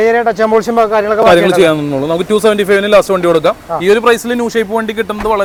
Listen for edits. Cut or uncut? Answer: uncut